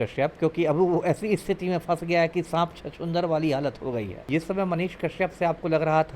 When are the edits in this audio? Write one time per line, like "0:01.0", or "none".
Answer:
0:04.2